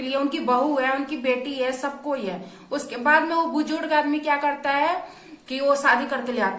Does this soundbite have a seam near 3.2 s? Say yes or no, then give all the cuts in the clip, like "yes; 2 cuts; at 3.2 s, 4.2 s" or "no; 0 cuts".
no; 0 cuts